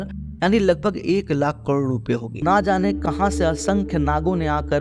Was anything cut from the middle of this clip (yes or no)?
yes